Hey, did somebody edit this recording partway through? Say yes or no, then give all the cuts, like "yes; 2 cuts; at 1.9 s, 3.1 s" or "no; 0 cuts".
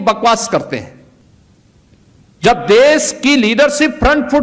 yes; 1 cut; at 1.3 s